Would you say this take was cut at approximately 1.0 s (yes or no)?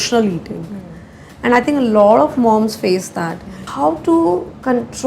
no